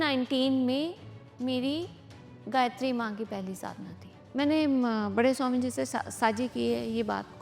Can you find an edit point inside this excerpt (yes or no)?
yes